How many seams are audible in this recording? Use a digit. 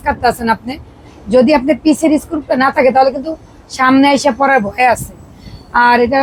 0